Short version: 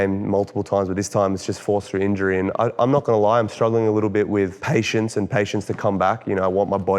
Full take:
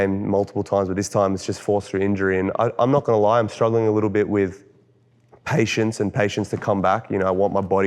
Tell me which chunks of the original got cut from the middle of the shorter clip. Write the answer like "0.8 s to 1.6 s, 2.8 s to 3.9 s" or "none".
4.6 s to 5.4 s